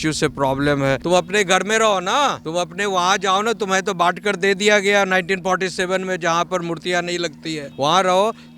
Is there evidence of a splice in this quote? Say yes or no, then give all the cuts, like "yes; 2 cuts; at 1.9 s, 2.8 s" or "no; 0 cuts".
yes; 3 cuts; at 1.0 s, 2.4 s, 7.7 s